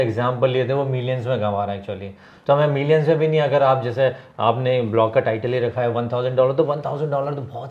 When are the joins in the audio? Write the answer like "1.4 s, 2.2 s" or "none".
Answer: none